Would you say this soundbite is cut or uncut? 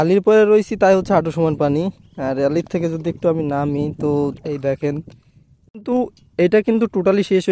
cut